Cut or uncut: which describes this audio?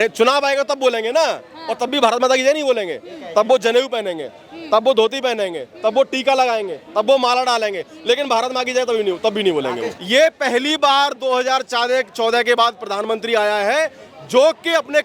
cut